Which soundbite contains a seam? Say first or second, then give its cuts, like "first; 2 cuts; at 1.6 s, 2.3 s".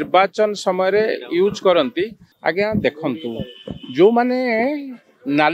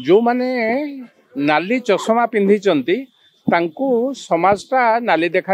first; 1 cut; at 2.2 s